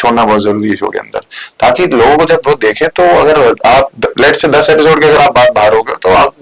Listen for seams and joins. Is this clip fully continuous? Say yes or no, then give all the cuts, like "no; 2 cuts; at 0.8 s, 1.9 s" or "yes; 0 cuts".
yes; 0 cuts